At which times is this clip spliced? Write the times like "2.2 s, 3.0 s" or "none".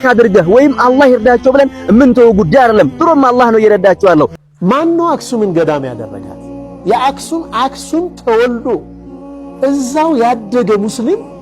4.4 s